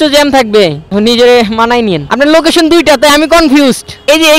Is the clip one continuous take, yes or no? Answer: no